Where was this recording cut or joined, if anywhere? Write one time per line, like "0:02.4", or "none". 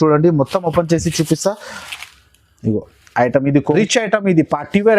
0:03.7